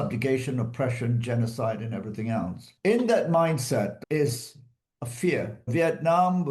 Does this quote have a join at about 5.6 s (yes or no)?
yes